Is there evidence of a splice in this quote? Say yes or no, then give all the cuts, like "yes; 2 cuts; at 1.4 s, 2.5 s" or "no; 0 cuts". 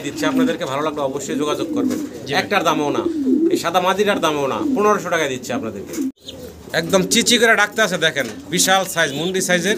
yes; 1 cut; at 6.3 s